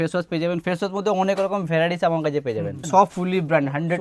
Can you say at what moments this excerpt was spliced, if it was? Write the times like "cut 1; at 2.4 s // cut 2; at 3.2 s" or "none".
cut 1; at 2.8 s